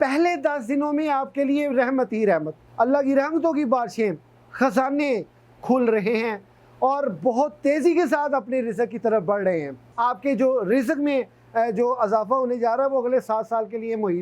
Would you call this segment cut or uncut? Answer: cut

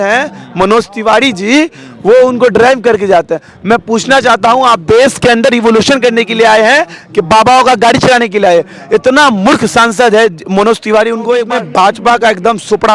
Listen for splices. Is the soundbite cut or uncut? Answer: cut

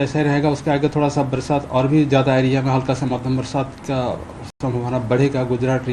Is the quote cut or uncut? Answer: uncut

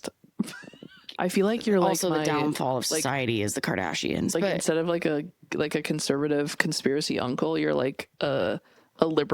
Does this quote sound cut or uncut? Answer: cut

